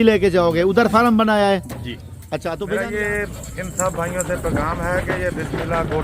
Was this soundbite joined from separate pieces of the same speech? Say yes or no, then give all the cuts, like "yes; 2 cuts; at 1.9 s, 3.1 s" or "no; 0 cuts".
yes; 1 cut; at 2.7 s